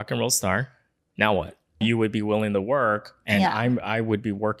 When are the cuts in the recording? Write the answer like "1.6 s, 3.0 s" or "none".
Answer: 1.8 s